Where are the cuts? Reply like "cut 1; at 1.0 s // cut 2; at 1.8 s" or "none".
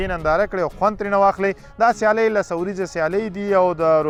none

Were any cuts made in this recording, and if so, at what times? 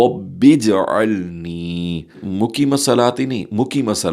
cut 1; at 2.2 s

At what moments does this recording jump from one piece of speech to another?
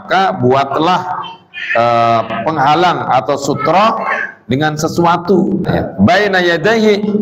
cut 1; at 5.6 s

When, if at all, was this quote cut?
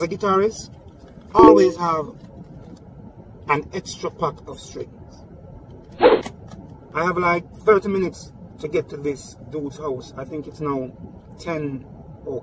none

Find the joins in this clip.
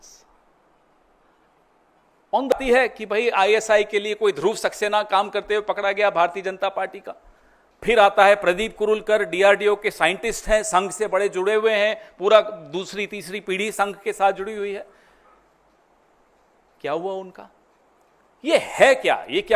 cut 1; at 2.5 s

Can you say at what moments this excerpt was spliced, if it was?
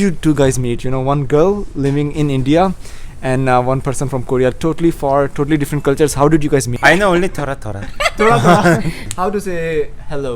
cut 1; at 6.7 s // cut 2; at 9.0 s

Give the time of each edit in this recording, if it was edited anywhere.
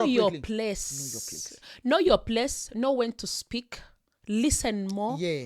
none

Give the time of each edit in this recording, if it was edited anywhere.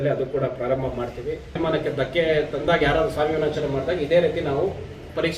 cut 1; at 1.6 s

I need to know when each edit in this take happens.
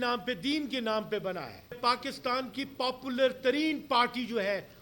cut 1; at 1.8 s

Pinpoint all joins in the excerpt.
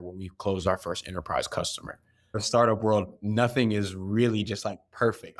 cut 1; at 2.3 s

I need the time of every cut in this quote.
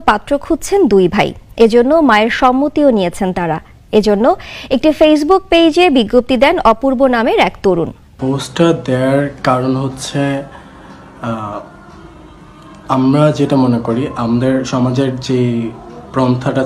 cut 1; at 8.0 s

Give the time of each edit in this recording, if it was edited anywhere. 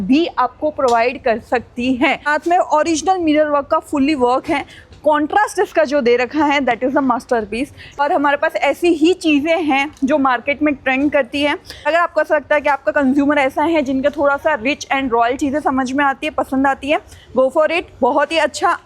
cut 1; at 2.3 s // cut 2; at 8.0 s // cut 3; at 11.9 s

